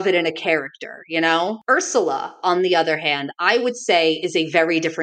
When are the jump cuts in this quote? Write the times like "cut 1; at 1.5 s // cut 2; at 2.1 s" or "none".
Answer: cut 1; at 1.6 s